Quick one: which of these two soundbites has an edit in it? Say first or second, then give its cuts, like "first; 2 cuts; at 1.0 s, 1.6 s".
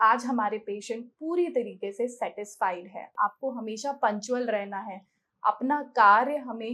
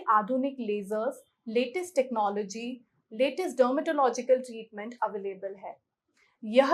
first; 1 cut; at 3.1 s